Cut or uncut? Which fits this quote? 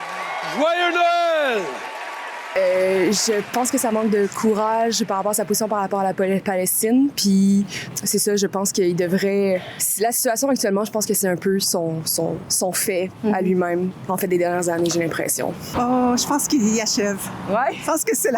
cut